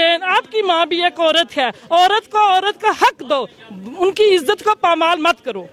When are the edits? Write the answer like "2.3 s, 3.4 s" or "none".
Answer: none